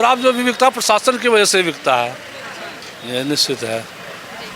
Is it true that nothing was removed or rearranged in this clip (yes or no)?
yes